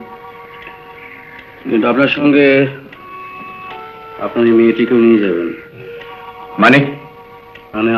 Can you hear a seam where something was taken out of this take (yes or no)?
no